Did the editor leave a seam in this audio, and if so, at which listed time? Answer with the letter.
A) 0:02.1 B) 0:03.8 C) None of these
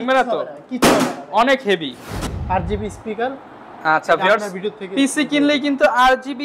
A